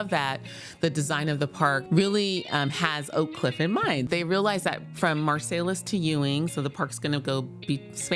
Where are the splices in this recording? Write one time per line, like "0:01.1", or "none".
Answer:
0:01.8
0:04.1